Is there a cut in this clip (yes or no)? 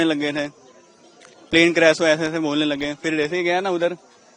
no